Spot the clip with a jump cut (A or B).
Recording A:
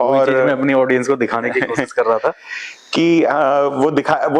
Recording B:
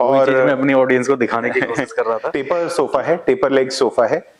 B